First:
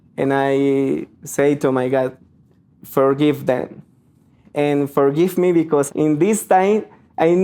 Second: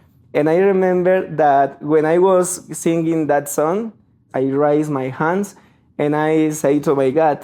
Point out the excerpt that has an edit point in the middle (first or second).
first